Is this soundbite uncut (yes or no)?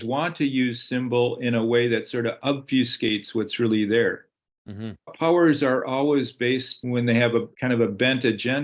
no